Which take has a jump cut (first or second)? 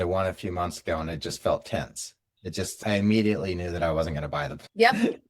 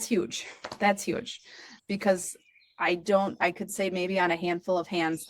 first